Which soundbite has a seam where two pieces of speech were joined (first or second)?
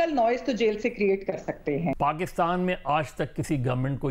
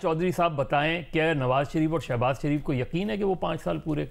first